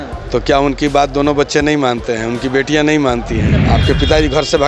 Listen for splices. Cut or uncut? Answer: cut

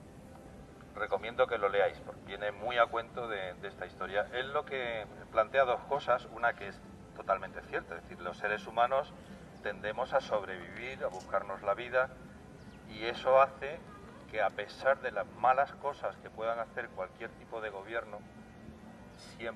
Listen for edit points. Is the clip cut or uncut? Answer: uncut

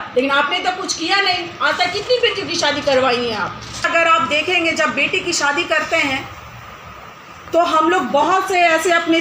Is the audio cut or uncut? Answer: cut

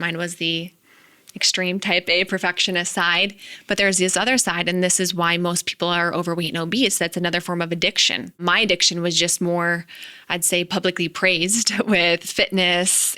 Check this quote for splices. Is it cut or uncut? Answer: cut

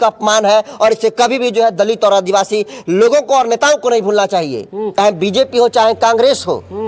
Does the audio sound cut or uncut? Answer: cut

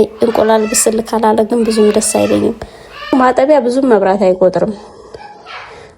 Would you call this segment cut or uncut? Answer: cut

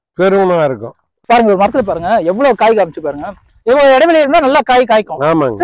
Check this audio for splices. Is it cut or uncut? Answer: cut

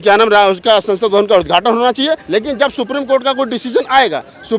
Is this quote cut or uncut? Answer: cut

